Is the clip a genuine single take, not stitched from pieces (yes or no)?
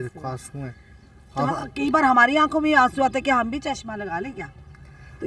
yes